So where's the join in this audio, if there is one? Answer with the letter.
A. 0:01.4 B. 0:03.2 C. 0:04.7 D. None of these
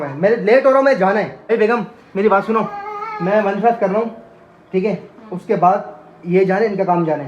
A